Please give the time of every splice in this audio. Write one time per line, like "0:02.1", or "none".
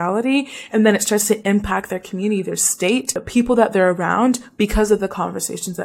0:03.2